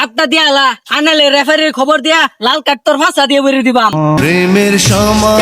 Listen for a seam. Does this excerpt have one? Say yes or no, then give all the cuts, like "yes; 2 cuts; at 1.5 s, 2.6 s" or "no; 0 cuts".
yes; 1 cut; at 4.2 s